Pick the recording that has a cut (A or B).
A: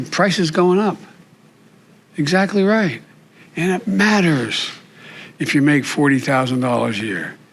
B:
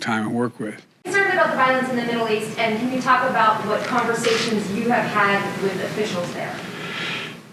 B